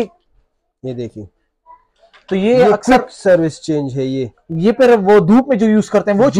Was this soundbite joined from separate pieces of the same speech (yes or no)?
no